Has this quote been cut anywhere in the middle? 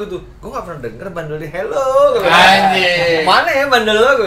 no; 0 cuts

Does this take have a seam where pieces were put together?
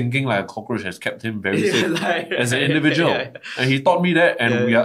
no; 0 cuts

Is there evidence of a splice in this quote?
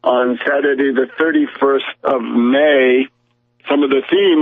no; 0 cuts

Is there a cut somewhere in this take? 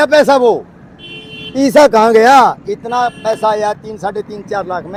no; 0 cuts

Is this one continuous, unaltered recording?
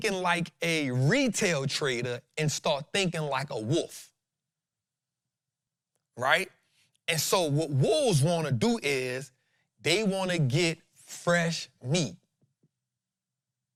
yes; 0 cuts

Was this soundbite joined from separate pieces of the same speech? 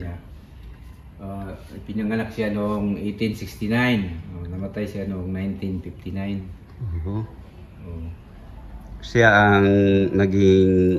no; 0 cuts

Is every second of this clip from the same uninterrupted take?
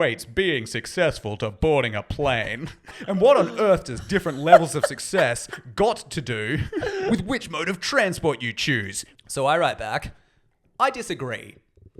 no; 3 cuts; at 3.0 s, 7.1 s, 9.0 s

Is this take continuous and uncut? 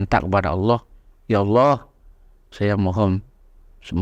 yes; 0 cuts

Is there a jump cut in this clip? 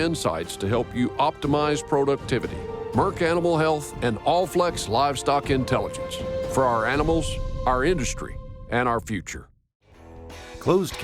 yes; 1 cut; at 10.0 s

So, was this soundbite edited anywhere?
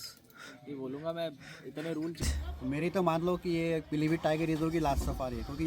yes; 1 cut; at 2.3 s

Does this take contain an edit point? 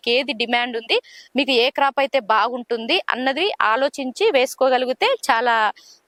no; 0 cuts

